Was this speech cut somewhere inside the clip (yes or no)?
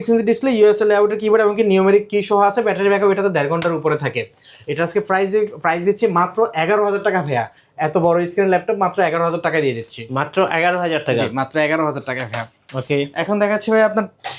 no